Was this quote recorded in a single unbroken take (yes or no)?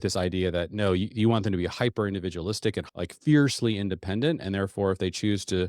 no